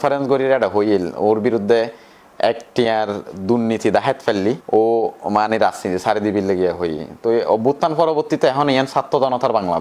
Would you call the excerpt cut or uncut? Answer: uncut